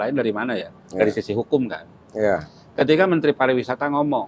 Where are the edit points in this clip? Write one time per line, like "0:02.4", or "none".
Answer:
none